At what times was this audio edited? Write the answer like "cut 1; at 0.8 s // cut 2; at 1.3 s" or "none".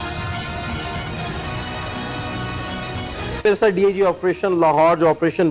cut 1; at 3.4 s